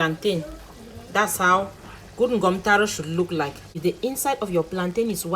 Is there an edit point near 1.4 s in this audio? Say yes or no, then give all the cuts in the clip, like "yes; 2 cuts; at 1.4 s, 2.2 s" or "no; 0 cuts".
no; 1 cut; at 3.8 s